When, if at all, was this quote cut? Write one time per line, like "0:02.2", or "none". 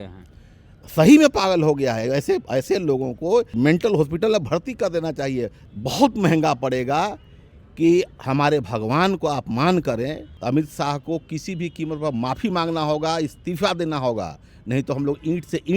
0:03.6
0:05.7
0:10.3